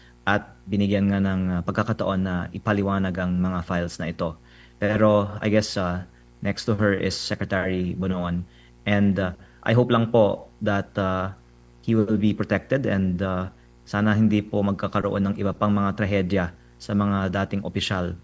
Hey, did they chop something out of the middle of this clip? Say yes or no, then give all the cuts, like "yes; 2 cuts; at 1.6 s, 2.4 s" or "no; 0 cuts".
no; 0 cuts